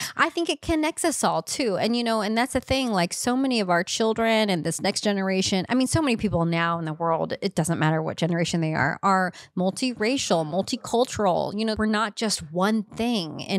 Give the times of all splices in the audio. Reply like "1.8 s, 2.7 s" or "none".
11.7 s